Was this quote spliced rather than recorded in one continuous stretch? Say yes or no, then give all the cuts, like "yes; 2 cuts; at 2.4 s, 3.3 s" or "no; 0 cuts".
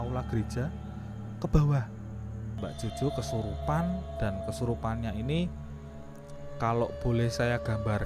yes; 1 cut; at 2.3 s